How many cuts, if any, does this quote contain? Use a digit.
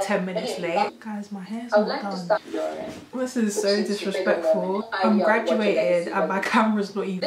3